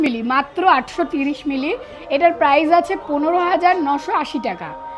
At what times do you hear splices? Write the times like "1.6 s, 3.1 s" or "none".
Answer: none

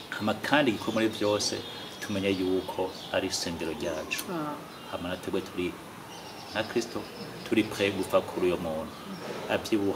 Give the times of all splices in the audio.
none

